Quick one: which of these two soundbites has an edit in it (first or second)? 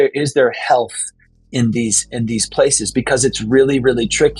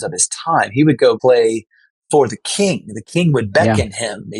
second